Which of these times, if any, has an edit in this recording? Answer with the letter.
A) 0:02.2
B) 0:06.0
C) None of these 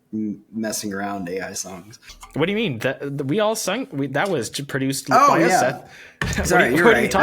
A